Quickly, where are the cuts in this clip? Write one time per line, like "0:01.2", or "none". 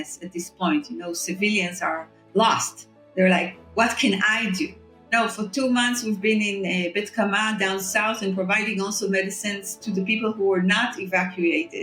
0:05.1